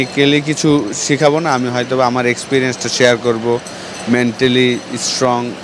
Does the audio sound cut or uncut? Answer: uncut